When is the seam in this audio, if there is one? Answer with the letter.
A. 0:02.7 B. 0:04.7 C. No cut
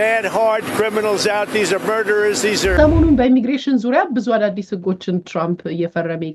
A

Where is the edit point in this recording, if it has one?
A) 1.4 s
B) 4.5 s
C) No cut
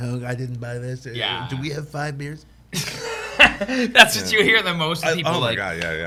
C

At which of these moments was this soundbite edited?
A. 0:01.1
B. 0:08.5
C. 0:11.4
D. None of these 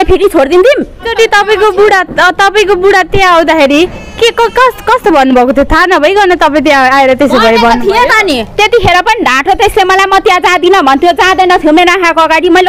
A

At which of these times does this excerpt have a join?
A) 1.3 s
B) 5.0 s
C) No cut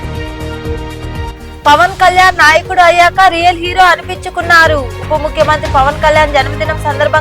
A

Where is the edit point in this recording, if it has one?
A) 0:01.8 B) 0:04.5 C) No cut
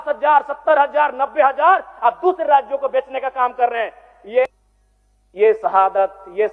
B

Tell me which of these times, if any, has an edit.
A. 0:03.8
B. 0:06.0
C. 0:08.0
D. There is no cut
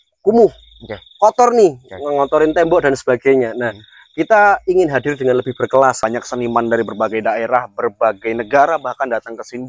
B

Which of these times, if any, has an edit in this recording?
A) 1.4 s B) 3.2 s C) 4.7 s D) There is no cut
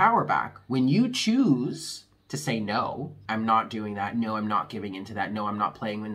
B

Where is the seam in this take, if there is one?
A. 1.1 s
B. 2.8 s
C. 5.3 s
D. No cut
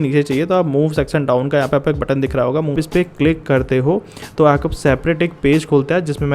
B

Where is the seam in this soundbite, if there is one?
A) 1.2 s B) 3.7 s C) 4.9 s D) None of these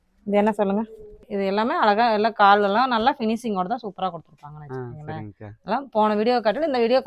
A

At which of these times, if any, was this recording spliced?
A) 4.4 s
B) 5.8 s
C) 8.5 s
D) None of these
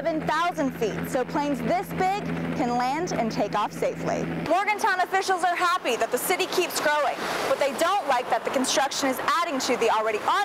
A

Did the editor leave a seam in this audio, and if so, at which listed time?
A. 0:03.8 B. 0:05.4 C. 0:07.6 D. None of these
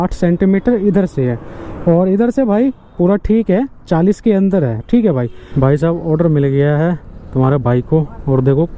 B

